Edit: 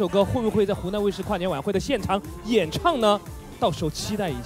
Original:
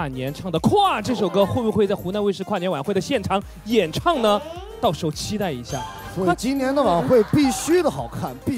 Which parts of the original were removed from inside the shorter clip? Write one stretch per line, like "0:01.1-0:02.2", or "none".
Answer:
none

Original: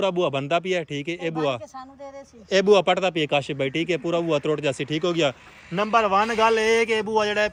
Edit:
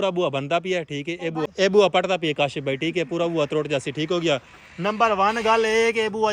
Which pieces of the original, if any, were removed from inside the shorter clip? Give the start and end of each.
0:01.5-0:02.4

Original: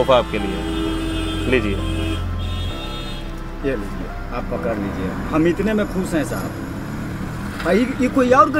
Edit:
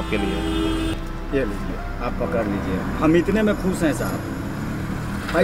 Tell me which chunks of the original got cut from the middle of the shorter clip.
0:01.1-0:03.2

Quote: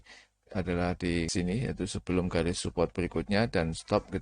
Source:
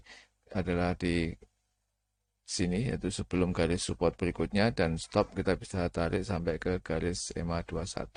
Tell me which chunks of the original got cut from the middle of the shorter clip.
0:01.3-0:02.5

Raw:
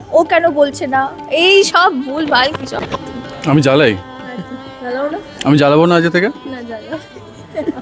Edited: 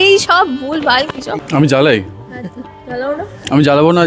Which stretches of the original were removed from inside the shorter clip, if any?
0:02.7-0:03.2

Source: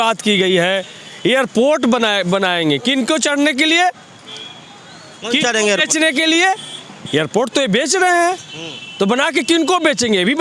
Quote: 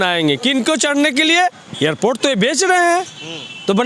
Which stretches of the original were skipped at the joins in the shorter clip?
0:04.1-0:07.0

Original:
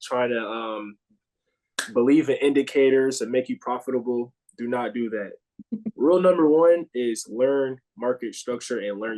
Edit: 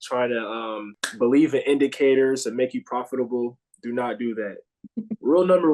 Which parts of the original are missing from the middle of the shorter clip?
0:01.0-0:01.7

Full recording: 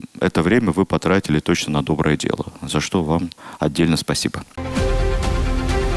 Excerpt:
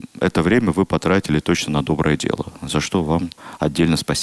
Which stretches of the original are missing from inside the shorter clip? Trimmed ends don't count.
none

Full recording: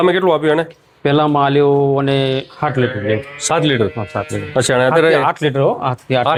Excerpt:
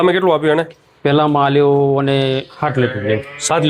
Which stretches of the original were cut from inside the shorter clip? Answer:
none

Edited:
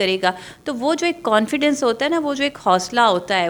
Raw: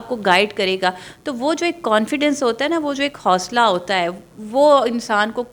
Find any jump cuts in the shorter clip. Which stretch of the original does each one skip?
none

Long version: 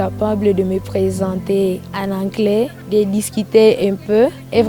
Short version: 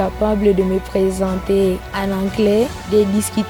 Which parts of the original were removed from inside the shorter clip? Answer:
none

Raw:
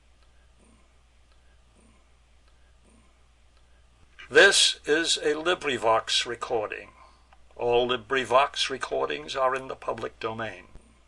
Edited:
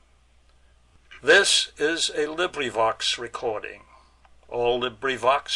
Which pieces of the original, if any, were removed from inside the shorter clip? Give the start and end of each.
0:01.7-0:04.0

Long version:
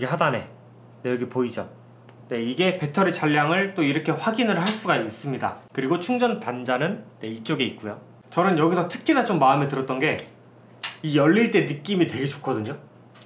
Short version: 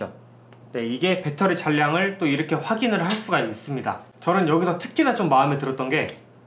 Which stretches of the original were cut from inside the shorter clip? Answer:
0:05.6-0:08.2

